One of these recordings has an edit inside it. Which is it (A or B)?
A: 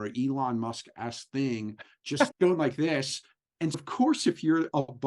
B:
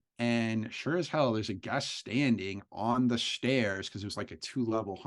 A